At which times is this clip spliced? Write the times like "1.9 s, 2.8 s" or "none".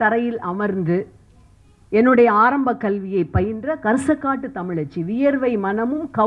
none